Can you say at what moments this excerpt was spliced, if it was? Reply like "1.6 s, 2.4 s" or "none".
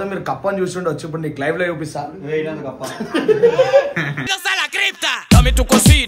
none